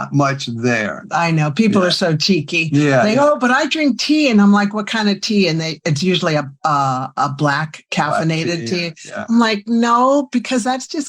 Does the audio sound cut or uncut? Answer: uncut